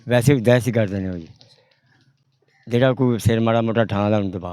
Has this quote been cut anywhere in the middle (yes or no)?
no